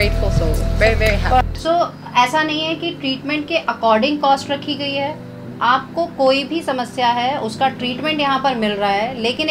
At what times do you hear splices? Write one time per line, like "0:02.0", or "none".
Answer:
0:01.4